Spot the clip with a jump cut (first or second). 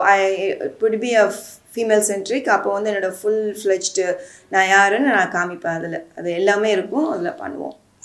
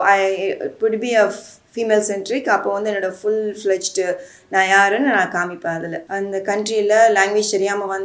second